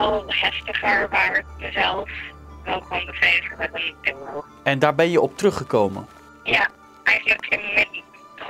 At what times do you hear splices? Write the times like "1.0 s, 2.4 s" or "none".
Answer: 4.5 s